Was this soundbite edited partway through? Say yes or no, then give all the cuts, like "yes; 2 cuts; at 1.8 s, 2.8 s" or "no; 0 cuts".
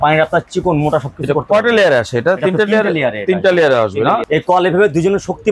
yes; 1 cut; at 4.2 s